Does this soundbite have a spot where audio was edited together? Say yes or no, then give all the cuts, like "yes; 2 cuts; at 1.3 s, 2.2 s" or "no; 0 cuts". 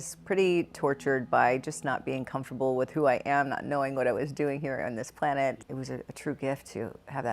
yes; 1 cut; at 5.5 s